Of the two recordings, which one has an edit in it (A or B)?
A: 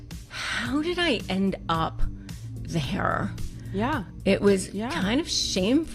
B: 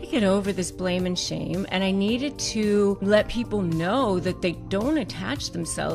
B